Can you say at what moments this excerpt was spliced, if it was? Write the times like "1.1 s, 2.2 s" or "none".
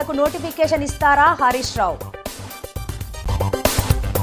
none